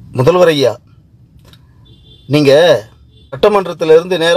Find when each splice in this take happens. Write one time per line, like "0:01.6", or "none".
0:03.4